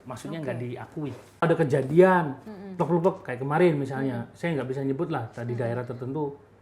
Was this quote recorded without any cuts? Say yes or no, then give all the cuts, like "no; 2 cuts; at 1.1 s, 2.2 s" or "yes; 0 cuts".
no; 1 cut; at 1.4 s